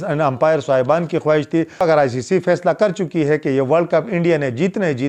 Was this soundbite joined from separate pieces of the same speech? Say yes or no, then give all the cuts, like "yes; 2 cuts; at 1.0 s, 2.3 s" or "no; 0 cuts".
yes; 1 cut; at 1.7 s